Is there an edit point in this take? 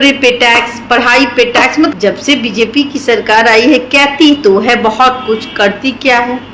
yes; 1 cut; at 2.0 s

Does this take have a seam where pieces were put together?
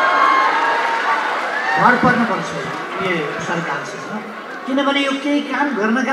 no; 0 cuts

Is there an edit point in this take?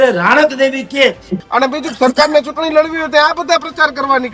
yes; 1 cut; at 1.3 s

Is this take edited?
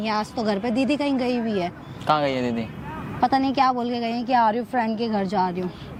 no; 0 cuts

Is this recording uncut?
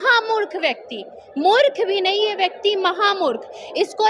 yes; 0 cuts

